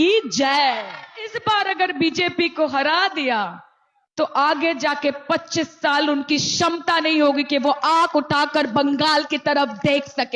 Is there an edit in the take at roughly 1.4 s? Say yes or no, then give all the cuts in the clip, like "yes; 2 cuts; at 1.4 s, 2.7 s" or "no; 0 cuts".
yes; 1 cut; at 1.4 s